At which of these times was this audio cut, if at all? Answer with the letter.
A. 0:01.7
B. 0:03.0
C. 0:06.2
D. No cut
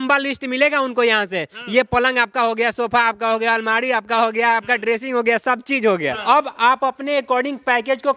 C